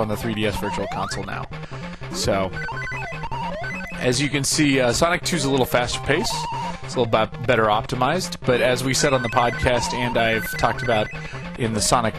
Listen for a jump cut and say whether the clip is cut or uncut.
uncut